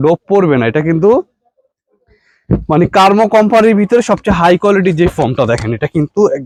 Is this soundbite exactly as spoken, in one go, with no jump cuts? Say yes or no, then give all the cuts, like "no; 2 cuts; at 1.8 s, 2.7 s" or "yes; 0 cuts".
yes; 0 cuts